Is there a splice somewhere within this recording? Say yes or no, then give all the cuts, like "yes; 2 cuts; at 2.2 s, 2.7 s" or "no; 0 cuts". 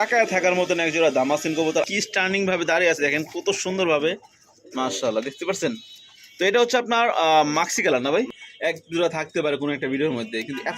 yes; 2 cuts; at 1.9 s, 8.4 s